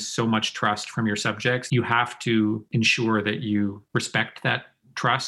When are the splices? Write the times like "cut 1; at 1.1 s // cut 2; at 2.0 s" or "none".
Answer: cut 1; at 1.6 s // cut 2; at 2.7 s // cut 3; at 3.8 s